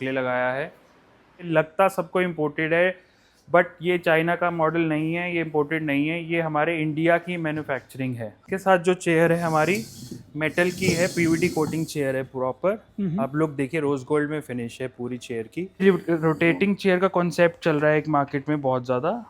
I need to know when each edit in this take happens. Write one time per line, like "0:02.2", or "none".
0:01.5
0:08.4
0:15.8